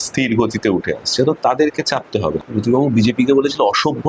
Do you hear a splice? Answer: yes; 1 cut; at 2.4 s

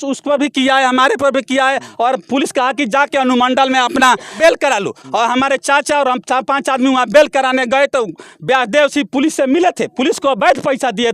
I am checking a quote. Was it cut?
yes; 1 cut; at 4.3 s

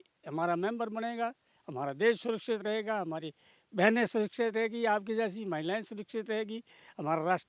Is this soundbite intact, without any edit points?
yes; 0 cuts

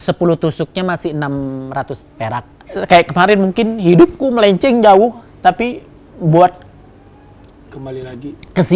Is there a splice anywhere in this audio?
yes; 1 cut; at 2.6 s

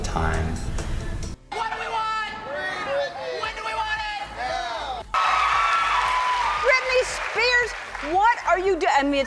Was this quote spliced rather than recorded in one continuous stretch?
yes; 2 cuts; at 1.3 s, 5.2 s

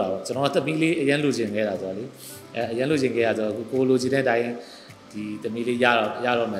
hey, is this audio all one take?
yes; 0 cuts

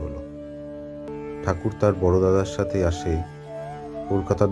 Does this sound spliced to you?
yes; 1 cut; at 1.1 s

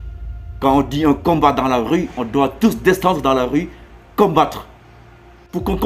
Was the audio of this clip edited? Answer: yes; 1 cut; at 4.8 s

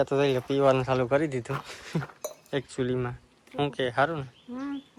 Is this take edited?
no; 0 cuts

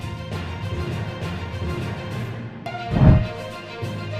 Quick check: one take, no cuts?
no; 1 cut; at 2.5 s

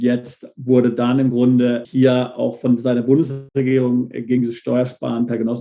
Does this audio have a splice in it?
yes; 2 cuts; at 1.8 s, 3.4 s

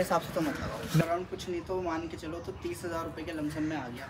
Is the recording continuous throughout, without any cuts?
no; 1 cut; at 1.0 s

